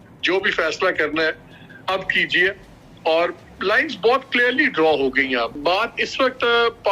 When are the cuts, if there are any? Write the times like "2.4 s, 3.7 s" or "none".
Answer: 5.5 s